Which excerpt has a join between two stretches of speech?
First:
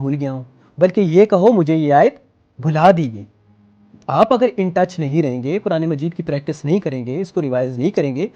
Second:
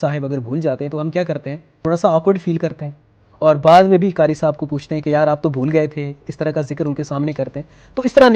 second; 1 cut; at 1.8 s

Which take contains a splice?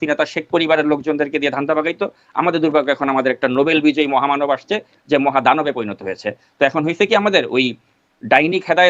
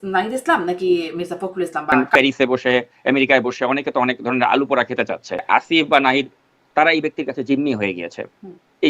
second; 2 cuts; at 1.9 s, 5.4 s

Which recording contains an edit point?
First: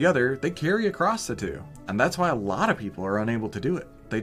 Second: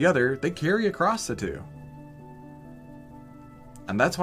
first; 1 cut; at 1.7 s

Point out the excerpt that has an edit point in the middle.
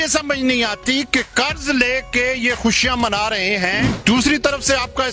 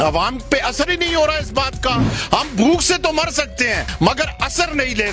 first; 1 cut; at 3.9 s

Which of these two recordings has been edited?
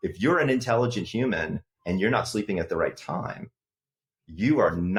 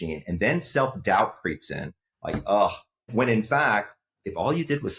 second; 1 cut; at 3.1 s

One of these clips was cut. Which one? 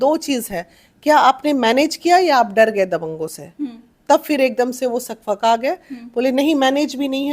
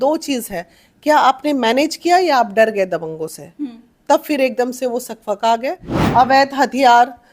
second; 1 cut; at 5.9 s

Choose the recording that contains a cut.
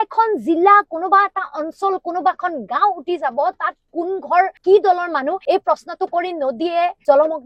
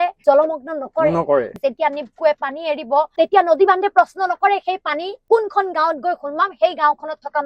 second; 3 cuts; at 1.6 s, 3.1 s, 5.2 s

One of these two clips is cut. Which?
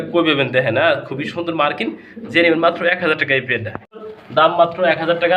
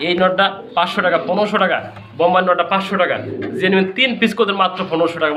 first; 1 cut; at 4.2 s

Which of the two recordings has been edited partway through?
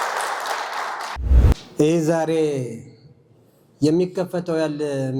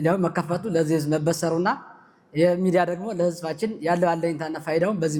first; 1 cut; at 1.2 s

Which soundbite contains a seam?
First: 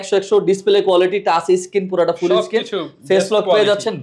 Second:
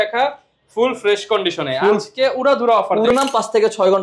second; 1 cut; at 3.1 s

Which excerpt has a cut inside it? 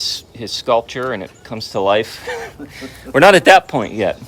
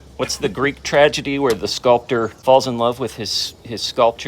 second; 1 cut; at 2.3 s

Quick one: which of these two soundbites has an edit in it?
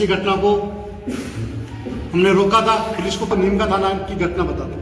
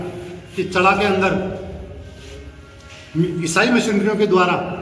first; 1 cut; at 3.3 s

